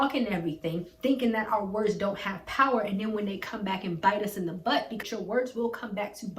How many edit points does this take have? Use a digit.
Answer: 1